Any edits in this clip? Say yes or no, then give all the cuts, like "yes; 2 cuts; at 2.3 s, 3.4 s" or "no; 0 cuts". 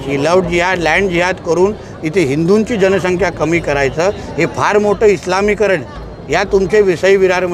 no; 0 cuts